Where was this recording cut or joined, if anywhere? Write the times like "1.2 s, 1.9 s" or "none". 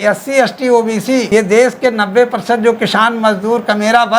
1.3 s